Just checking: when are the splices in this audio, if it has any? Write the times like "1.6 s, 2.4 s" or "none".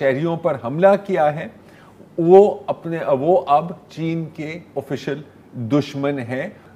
none